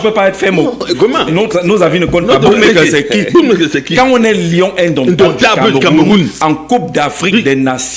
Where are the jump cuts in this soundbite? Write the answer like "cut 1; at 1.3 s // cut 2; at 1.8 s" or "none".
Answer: none